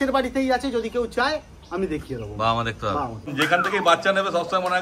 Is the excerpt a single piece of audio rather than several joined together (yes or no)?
no